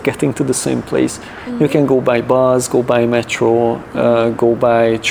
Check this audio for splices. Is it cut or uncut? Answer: uncut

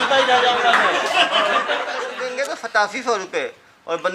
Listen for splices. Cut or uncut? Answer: cut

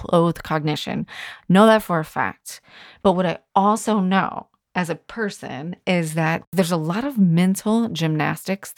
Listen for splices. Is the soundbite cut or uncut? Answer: cut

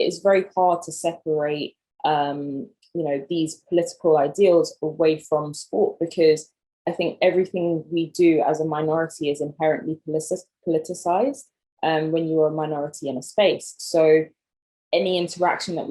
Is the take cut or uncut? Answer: uncut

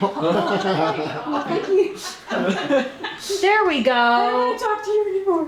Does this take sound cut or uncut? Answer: uncut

